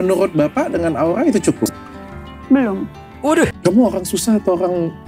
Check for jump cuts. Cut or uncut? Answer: cut